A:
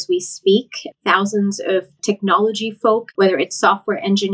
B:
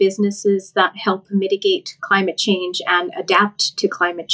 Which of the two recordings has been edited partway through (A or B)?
A